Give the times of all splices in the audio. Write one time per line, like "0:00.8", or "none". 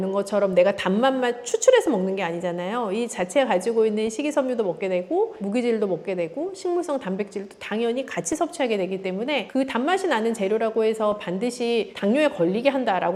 none